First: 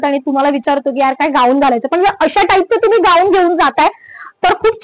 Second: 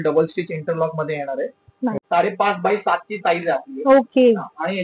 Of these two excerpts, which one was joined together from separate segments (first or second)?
second